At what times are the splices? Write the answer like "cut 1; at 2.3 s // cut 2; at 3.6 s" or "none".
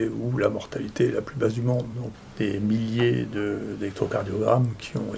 cut 1; at 2.0 s